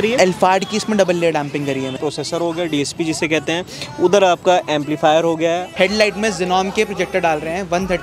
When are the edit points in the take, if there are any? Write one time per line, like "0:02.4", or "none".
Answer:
0:02.0
0:05.7